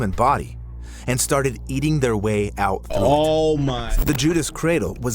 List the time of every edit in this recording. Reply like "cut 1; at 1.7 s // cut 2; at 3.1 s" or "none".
cut 1; at 3.8 s